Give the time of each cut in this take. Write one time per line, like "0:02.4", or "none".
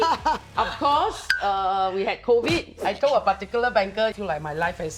0:02.7
0:04.2